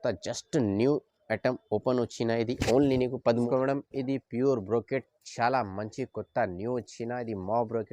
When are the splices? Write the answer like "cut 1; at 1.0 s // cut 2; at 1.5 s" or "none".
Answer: cut 1; at 3.3 s